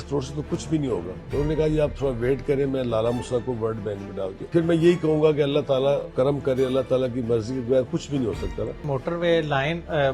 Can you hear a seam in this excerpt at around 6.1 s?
yes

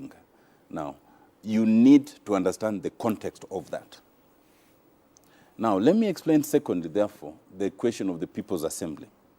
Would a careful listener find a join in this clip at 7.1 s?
no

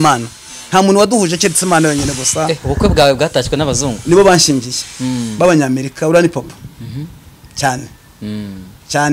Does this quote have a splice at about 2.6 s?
no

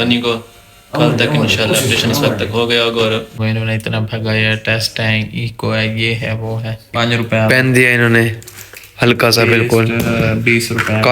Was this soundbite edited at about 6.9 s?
yes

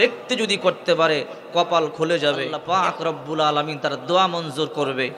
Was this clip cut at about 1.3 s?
no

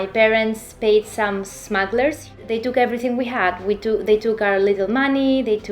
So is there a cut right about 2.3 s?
yes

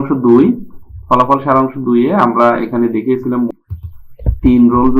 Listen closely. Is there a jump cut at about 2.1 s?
no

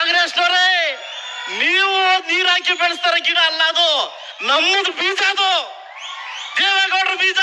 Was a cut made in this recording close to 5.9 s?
no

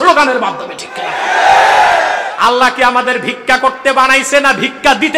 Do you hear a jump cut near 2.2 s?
yes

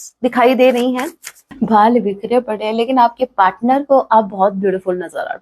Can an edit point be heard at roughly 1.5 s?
yes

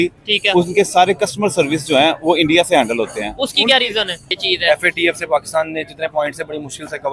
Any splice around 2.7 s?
no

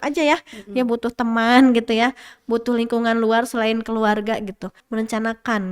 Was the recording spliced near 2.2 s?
no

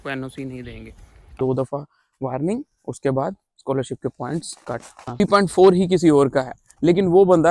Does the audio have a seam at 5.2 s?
yes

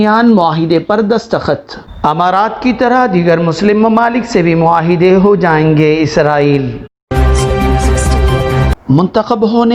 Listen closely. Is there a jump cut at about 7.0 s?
yes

